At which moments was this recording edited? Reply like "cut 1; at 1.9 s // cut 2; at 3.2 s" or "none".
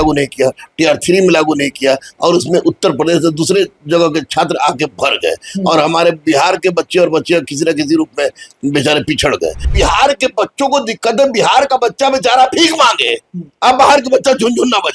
cut 1; at 9.7 s

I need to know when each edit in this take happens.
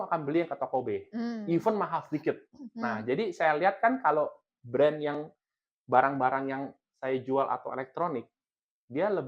none

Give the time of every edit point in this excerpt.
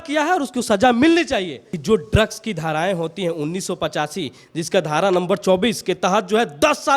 cut 1; at 1.7 s

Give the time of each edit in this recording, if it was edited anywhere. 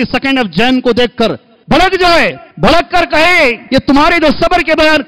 cut 1; at 1.5 s // cut 2; at 2.4 s // cut 3; at 3.6 s

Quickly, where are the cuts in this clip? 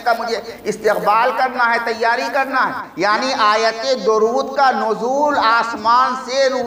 cut 1; at 2.8 s

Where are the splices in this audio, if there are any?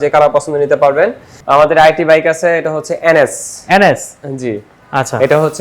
cut 1; at 1.3 s

